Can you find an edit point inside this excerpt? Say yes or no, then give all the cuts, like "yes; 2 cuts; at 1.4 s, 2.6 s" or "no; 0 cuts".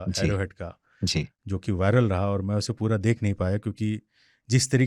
no; 0 cuts